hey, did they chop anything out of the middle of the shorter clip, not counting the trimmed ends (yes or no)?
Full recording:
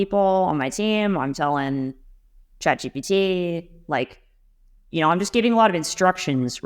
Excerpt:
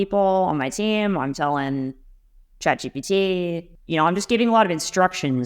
yes